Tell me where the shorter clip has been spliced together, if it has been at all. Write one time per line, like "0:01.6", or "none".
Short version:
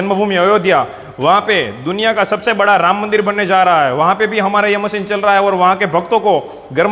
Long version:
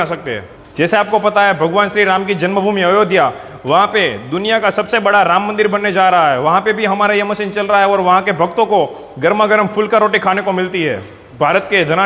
none